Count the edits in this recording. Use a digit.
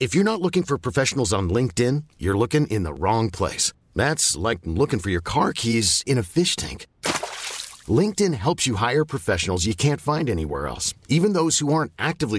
0